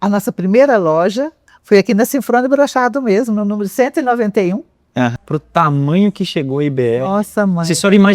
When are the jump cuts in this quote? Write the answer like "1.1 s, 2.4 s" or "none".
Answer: 5.1 s

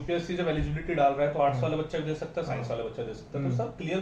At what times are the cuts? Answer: none

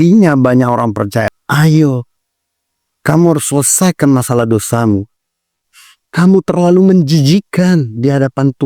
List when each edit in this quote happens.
1.3 s

